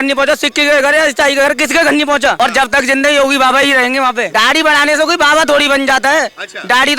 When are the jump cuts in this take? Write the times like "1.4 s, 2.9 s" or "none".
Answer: 2.3 s, 4.3 s